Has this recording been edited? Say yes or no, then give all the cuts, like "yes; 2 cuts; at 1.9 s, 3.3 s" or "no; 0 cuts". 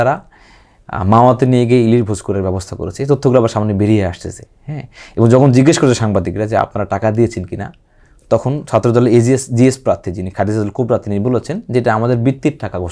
no; 0 cuts